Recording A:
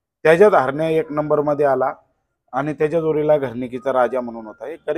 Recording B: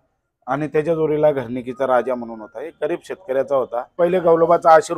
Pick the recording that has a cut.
B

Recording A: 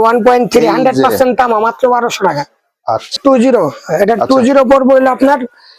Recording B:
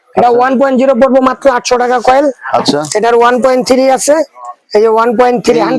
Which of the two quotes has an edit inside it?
A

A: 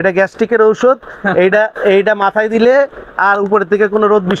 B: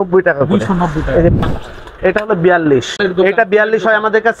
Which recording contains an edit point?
B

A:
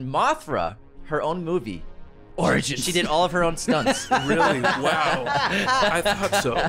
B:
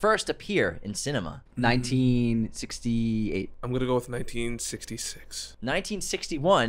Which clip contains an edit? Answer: B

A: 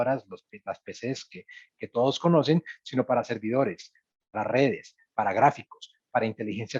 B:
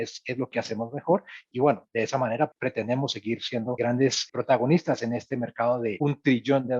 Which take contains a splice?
B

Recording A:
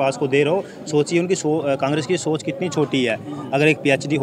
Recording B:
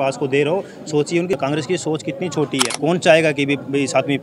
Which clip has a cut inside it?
B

